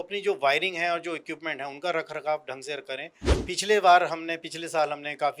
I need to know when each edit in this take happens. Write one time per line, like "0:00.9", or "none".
0:03.4